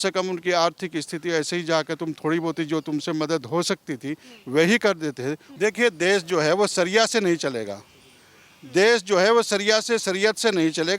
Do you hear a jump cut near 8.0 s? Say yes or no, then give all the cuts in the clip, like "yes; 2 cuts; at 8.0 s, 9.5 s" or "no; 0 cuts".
no; 1 cut; at 5.5 s